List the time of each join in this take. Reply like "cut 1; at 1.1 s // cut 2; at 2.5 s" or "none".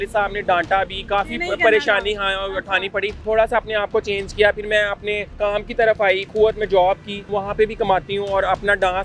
cut 1; at 3.2 s // cut 2; at 5.3 s // cut 3; at 6.3 s // cut 4; at 7.3 s